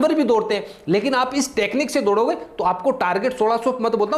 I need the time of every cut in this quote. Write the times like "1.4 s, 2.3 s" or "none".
none